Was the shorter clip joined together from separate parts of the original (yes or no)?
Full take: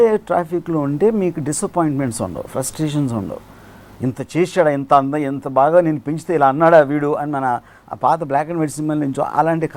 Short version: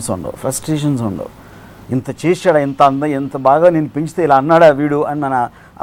no